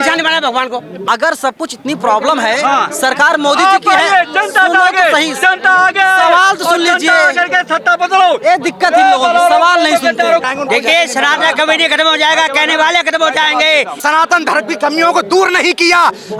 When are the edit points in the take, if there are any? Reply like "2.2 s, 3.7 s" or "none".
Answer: 1.0 s, 10.4 s, 14.0 s

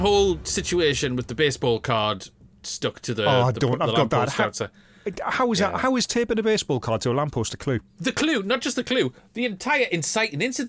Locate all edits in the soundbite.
7.9 s

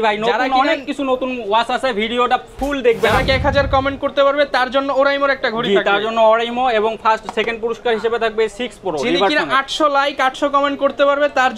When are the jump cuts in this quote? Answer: 3.2 s

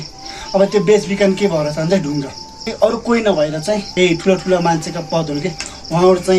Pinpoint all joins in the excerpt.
3.9 s

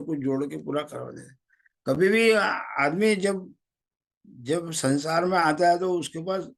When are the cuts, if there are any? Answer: none

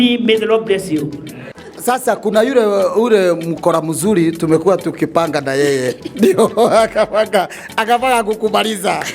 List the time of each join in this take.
1.5 s

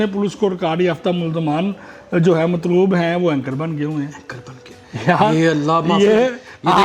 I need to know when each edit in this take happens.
none

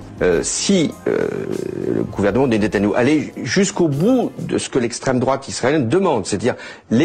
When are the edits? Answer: 0.9 s

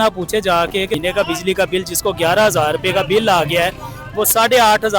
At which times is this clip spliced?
1.0 s

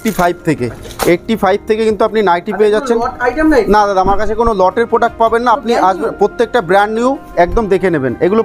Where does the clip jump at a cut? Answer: none

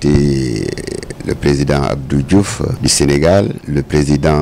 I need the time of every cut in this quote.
2.8 s, 3.6 s

